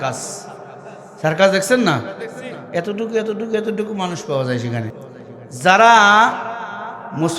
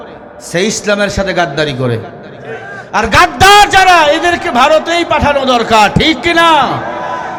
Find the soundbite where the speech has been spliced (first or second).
first